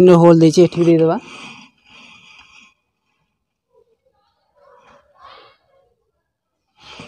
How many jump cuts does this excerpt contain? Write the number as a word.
zero